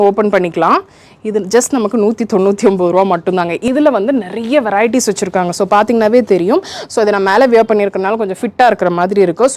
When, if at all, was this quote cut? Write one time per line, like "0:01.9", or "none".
0:03.6